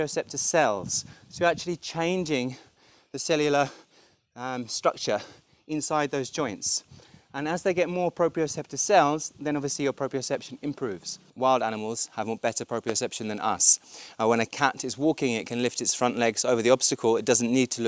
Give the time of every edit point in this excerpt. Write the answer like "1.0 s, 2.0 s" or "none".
11.3 s